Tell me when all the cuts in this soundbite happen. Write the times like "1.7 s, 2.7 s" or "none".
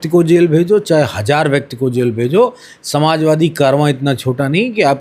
none